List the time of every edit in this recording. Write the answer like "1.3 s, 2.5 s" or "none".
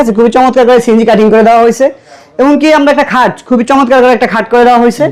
none